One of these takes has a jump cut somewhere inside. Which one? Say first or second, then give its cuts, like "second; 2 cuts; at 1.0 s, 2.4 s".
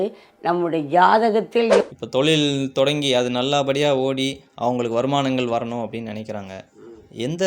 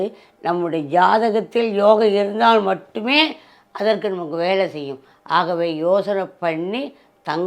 first; 1 cut; at 1.8 s